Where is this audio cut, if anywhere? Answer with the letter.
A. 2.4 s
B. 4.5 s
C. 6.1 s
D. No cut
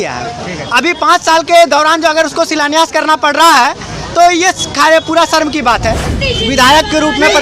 C